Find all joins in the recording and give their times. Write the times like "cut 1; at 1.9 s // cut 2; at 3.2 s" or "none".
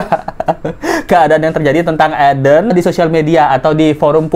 cut 1; at 2.7 s